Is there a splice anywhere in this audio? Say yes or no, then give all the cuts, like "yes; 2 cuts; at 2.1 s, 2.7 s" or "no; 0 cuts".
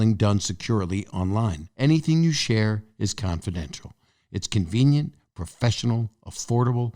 yes; 1 cut; at 1.6 s